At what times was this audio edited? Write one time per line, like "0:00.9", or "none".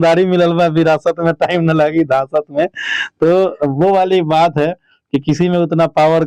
none